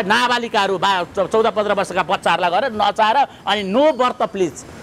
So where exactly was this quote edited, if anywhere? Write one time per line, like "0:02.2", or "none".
none